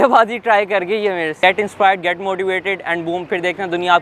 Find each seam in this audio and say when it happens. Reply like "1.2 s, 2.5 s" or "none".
1.4 s